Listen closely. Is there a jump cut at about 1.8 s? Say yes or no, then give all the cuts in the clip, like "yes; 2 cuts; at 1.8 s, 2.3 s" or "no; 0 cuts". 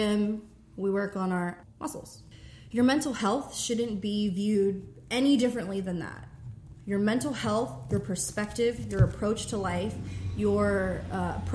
yes; 1 cut; at 1.8 s